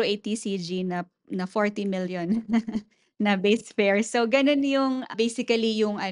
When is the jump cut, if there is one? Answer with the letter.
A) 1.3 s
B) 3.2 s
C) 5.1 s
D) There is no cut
C